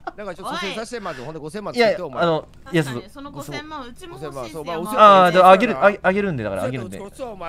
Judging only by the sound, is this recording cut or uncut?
uncut